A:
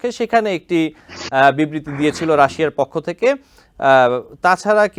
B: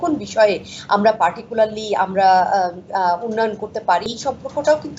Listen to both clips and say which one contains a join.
B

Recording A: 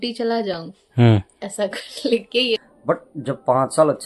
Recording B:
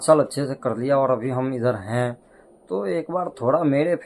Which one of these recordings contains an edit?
A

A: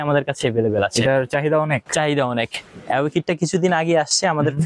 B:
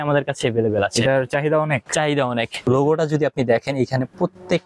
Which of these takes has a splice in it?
B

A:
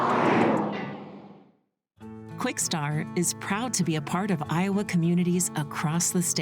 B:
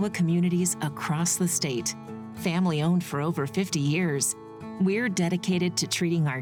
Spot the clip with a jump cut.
A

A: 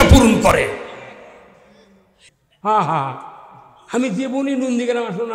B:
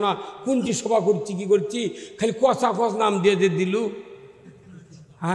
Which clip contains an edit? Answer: A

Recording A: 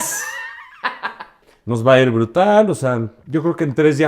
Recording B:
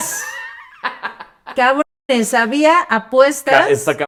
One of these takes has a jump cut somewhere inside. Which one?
A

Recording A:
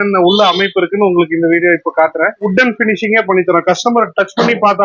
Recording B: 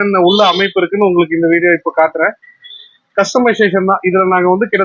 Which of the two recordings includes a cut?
A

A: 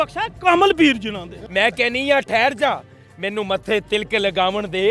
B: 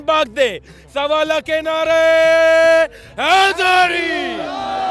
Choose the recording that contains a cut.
A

